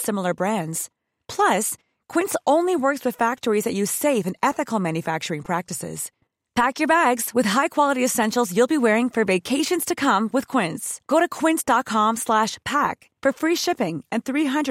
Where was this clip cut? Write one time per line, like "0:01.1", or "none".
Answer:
none